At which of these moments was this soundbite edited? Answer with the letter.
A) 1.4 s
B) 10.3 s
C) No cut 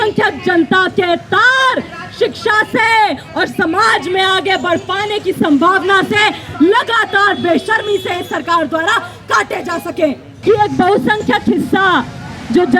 B